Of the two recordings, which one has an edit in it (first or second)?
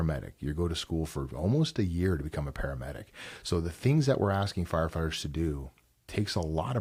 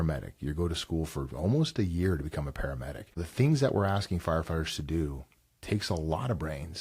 second